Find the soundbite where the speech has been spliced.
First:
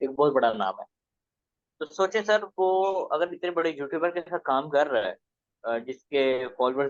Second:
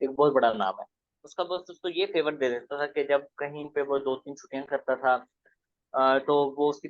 second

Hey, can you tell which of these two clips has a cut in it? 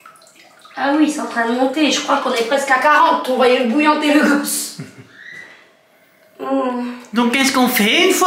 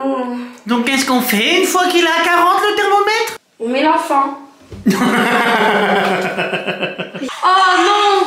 second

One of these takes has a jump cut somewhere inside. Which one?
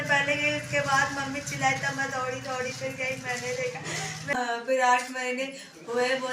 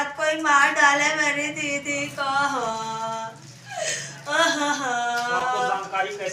first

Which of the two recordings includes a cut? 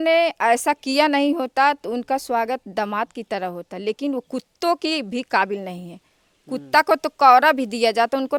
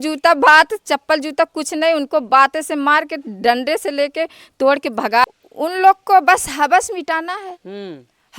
second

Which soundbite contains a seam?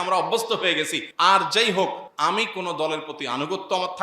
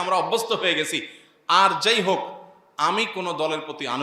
first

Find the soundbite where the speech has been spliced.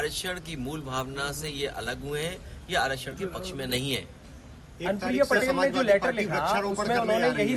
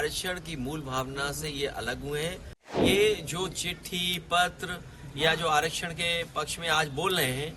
second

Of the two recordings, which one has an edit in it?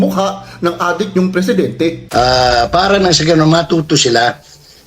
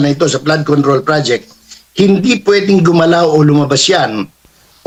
first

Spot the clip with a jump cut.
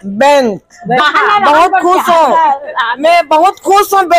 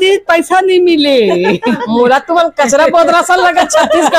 first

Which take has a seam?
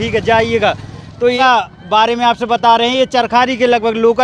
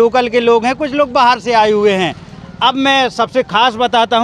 first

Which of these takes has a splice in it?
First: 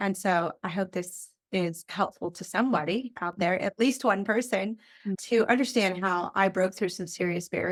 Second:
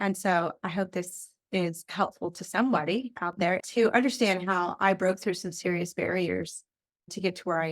second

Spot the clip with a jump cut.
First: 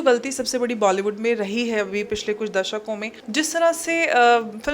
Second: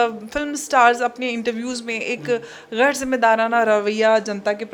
first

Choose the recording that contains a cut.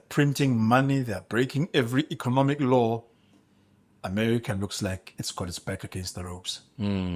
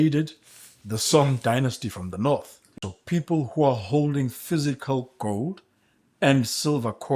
second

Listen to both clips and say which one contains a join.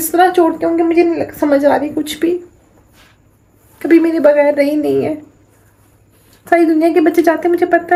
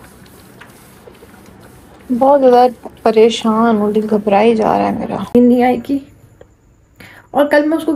second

